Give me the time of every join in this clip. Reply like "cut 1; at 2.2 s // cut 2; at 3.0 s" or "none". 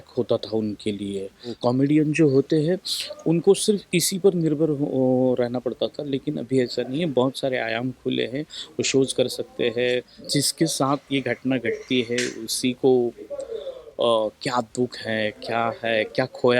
cut 1; at 1.6 s // cut 2; at 10.2 s